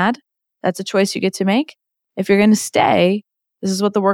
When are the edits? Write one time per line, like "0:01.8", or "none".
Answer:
none